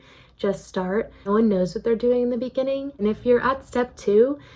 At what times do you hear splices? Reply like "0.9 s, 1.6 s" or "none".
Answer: 1.3 s, 2.9 s